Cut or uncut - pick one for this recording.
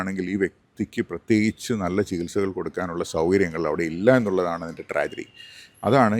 uncut